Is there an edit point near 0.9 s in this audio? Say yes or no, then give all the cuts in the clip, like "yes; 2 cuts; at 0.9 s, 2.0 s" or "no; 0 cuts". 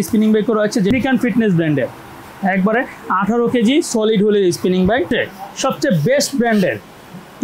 yes; 2 cuts; at 0.9 s, 5.1 s